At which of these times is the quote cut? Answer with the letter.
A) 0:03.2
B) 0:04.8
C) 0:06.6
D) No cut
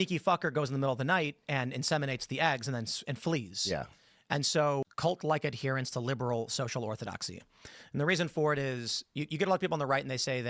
B